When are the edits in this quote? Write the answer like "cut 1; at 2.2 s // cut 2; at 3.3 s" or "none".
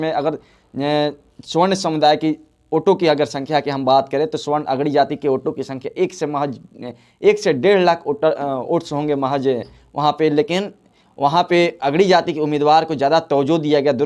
none